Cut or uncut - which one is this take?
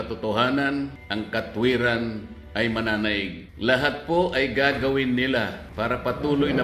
cut